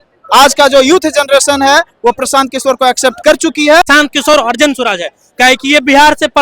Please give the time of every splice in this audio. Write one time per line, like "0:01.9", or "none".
0:03.9